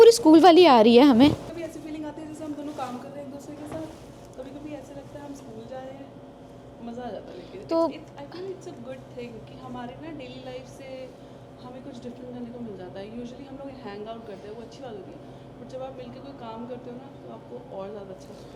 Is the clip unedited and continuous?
yes; 0 cuts

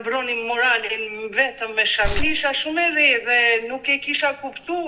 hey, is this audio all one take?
no; 1 cut; at 2.2 s

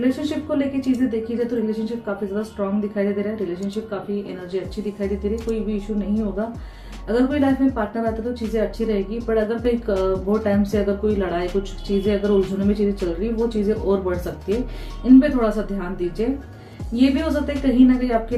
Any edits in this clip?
no; 0 cuts

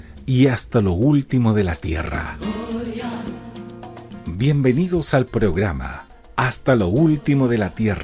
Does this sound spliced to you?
yes; 1 cut; at 6.9 s

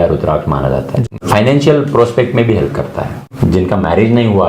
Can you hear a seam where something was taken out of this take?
yes; 2 cuts; at 0.9 s, 3.2 s

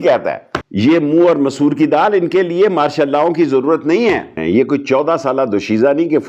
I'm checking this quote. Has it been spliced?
yes; 1 cut; at 4.4 s

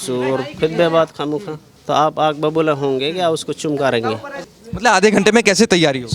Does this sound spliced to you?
yes; 1 cut; at 4.4 s

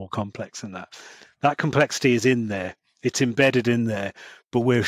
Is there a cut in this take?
no; 0 cuts

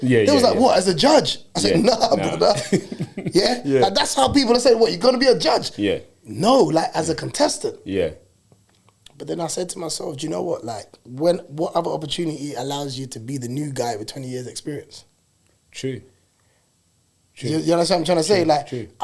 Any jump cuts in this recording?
no; 0 cuts

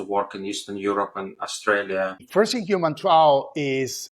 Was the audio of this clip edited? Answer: yes; 1 cut; at 2.2 s

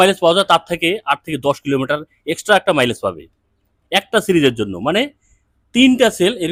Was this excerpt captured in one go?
yes; 0 cuts

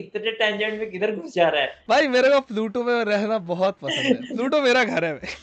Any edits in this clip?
yes; 1 cut; at 1.8 s

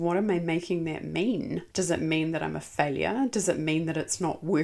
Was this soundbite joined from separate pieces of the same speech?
yes; 1 cut; at 1.6 s

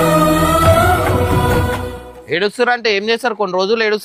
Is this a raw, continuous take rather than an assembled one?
yes; 0 cuts

